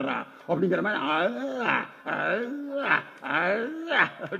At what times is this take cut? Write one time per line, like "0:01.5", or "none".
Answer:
none